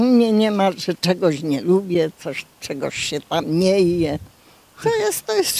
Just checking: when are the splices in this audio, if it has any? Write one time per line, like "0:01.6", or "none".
none